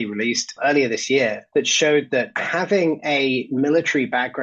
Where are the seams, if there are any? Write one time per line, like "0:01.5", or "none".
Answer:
0:01.4
0:02.4